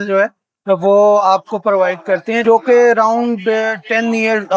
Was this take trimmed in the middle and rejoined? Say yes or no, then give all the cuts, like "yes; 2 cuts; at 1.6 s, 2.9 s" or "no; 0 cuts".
yes; 1 cut; at 2.4 s